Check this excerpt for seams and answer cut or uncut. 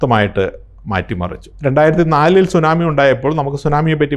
cut